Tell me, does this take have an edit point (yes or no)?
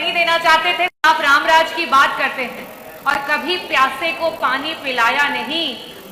yes